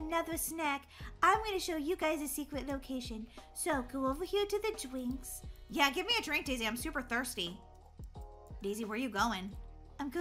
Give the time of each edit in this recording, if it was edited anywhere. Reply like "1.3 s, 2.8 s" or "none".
none